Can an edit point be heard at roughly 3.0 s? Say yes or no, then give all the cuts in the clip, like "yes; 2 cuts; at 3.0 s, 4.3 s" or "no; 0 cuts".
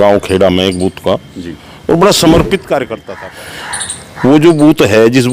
yes; 1 cut; at 3.0 s